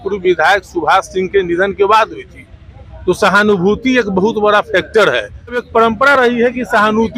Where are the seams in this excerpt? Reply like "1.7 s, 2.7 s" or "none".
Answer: 5.6 s